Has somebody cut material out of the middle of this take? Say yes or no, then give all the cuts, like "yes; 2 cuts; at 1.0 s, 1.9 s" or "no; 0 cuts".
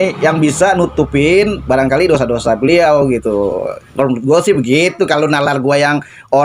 no; 0 cuts